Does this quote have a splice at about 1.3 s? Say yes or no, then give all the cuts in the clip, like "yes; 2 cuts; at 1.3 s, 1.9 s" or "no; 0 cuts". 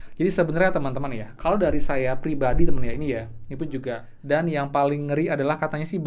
no; 1 cut; at 4.1 s